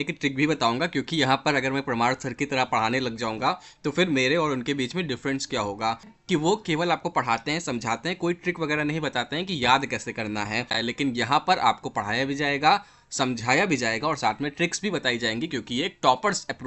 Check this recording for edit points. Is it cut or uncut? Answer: cut